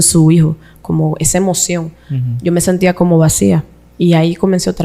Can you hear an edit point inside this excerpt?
no; 0 cuts

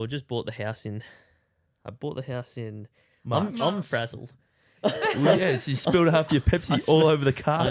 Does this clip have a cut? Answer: no; 0 cuts

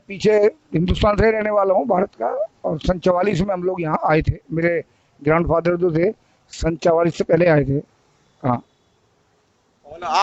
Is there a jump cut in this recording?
no; 0 cuts

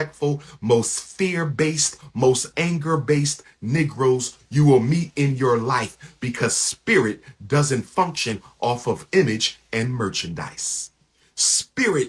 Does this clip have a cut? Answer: no; 0 cuts

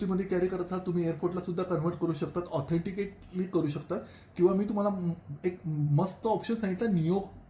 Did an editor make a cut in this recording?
no; 0 cuts

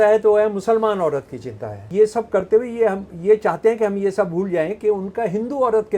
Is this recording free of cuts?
no; 1 cut; at 1.8 s

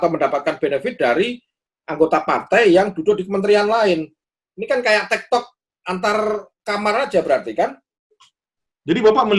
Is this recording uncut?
yes; 0 cuts

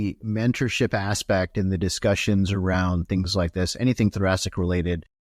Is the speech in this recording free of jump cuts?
yes; 0 cuts

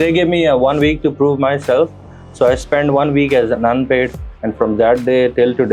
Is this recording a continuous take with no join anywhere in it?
yes; 0 cuts

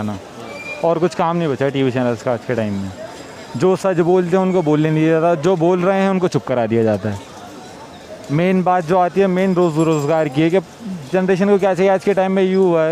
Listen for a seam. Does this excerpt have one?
no; 0 cuts

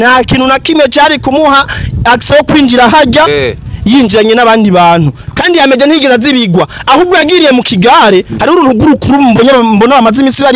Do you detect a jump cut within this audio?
no; 0 cuts

